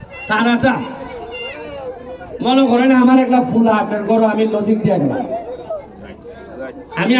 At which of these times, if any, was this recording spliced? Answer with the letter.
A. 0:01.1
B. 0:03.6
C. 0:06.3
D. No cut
D